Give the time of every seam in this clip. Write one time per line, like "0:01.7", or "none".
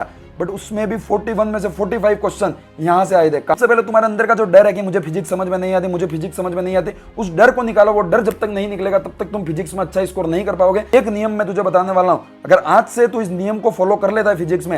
0:03.6
0:10.9

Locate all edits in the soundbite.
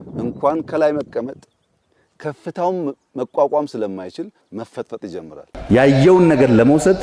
0:05.5

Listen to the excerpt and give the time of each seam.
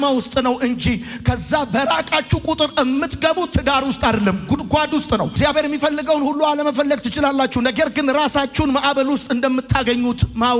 0:05.3

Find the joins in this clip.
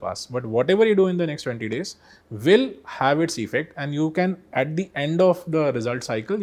none

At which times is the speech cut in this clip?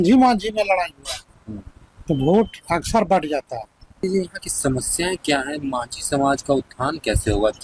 0:04.0

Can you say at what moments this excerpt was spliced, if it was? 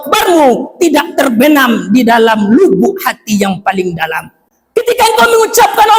none

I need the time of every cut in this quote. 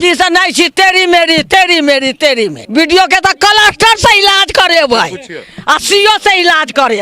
0:02.6

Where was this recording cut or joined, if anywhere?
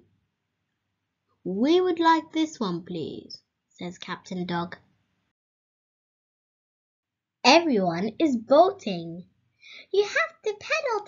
0:01.9

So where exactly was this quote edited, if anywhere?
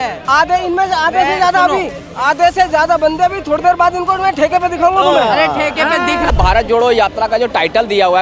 0:06.3

